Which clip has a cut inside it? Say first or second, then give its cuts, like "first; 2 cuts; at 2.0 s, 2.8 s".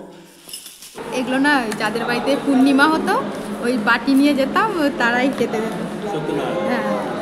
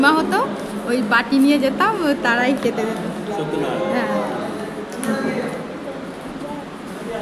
first; 1 cut; at 1.0 s